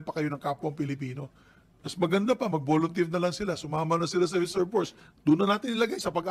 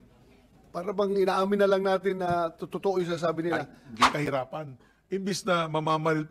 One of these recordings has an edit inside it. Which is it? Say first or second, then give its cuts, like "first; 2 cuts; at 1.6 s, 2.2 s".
second; 1 cut; at 4.1 s